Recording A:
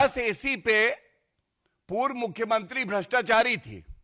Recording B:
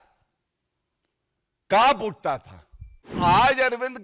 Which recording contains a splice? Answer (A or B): B